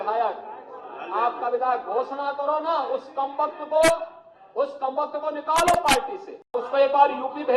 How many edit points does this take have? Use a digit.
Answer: 1